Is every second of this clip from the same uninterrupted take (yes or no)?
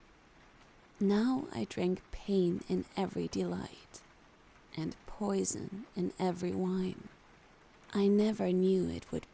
yes